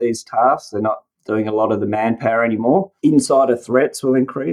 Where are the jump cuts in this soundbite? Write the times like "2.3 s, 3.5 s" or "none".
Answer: 2.9 s

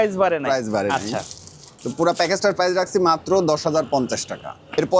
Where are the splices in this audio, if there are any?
none

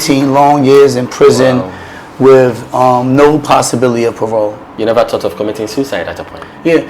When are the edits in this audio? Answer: 4.7 s

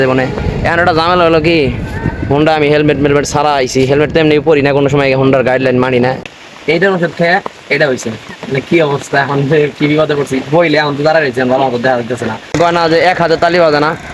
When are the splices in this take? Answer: 6.2 s, 12.6 s

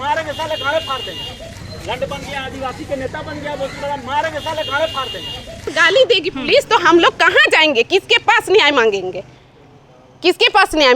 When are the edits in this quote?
1.7 s, 5.7 s

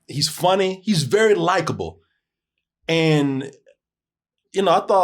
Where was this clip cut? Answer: none

